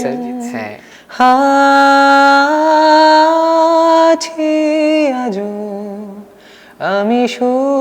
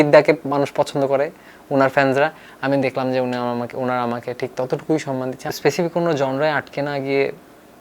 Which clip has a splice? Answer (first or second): second